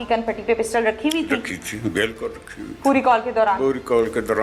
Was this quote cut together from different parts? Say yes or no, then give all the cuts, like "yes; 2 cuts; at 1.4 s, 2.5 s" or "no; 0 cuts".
no; 0 cuts